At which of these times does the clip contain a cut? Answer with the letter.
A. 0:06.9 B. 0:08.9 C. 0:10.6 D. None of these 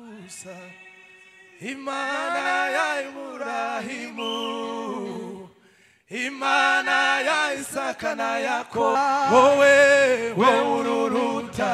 B